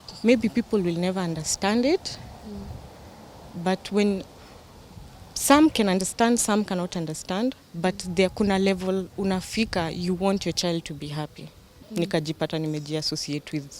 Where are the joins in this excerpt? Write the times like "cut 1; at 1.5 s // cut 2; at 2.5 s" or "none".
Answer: cut 1; at 11.8 s